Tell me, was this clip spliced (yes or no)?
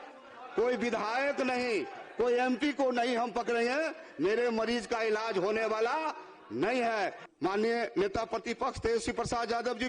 yes